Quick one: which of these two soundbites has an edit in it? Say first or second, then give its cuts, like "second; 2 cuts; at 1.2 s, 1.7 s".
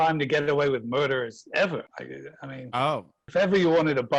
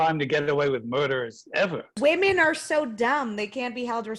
second; 1 cut; at 1.9 s